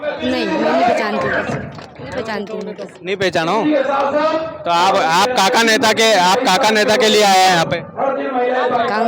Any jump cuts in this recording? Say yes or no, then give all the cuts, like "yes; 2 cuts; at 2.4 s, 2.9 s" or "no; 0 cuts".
no; 0 cuts